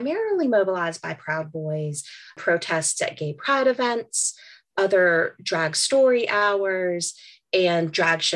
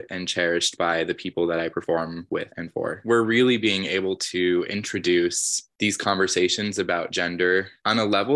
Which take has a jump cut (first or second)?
second